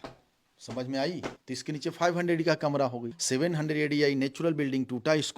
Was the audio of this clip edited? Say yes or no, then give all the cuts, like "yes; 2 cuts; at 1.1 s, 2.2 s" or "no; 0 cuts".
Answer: yes; 2 cuts; at 1.4 s, 3.1 s